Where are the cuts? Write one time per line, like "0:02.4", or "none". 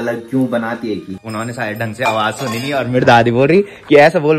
0:01.2